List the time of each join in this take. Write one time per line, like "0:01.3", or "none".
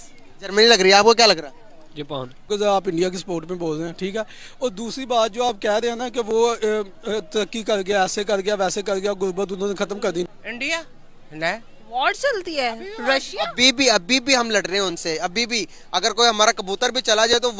0:02.4
0:10.3